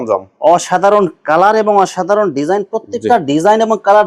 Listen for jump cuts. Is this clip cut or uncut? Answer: uncut